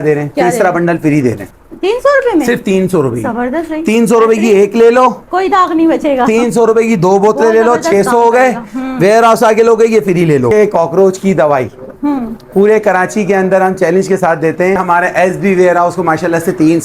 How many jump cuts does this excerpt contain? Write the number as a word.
three